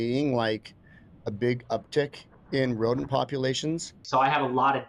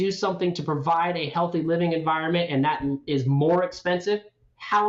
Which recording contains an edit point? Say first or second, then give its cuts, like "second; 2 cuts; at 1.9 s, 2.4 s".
first; 1 cut; at 4.0 s